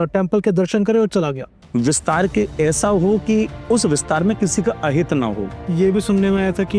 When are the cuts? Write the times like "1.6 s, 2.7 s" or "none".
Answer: 1.5 s, 5.6 s